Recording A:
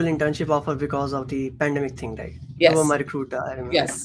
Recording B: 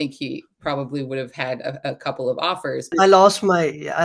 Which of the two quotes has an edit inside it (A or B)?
B